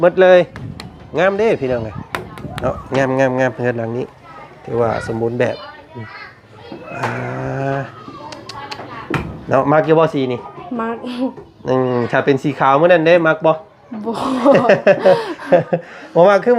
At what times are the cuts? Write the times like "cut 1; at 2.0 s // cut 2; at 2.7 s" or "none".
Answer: none